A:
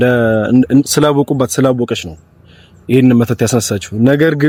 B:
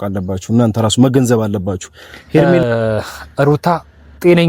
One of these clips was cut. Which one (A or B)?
B